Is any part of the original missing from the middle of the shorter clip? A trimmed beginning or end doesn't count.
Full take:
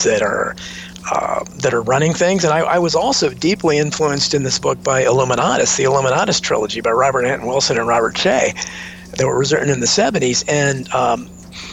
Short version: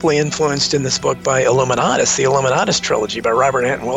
no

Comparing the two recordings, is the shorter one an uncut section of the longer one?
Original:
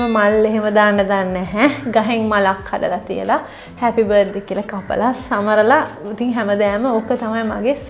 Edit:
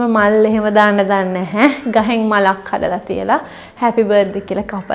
yes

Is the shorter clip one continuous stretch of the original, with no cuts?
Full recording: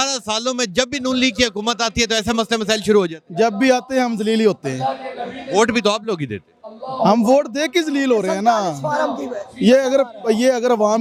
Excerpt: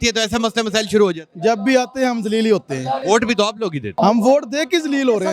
no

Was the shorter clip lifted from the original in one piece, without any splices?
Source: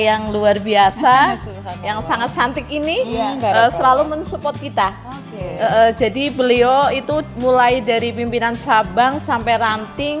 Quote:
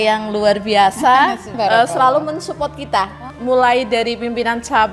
no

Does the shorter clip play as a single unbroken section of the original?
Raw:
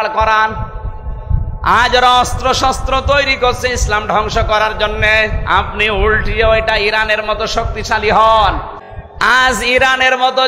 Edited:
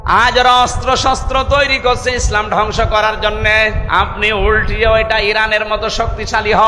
yes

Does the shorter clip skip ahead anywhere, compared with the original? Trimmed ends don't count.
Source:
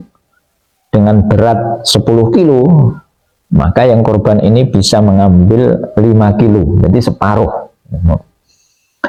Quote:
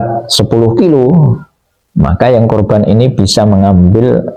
no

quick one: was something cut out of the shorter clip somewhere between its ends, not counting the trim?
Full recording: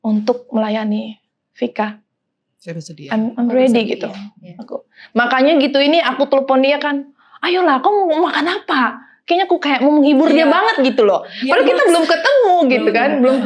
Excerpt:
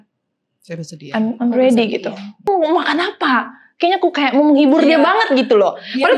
yes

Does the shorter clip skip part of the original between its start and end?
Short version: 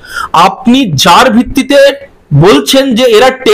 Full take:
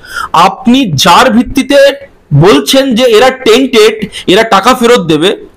no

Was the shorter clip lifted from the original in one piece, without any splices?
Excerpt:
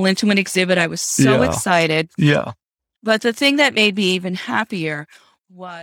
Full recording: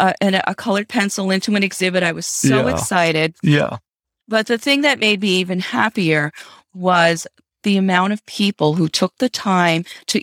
yes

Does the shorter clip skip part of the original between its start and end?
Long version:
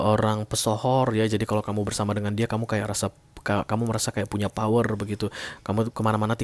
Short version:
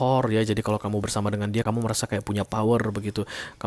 yes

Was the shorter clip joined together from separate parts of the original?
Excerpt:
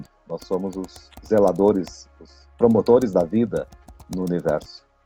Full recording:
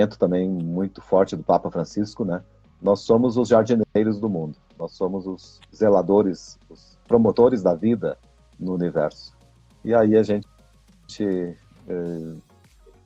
no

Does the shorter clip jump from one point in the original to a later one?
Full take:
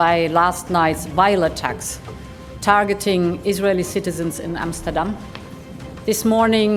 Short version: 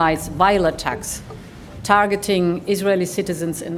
no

